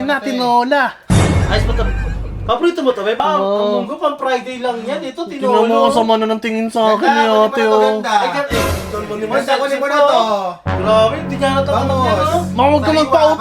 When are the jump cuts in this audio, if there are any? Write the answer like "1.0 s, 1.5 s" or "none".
3.2 s